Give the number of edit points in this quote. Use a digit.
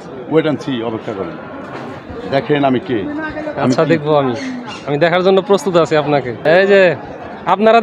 1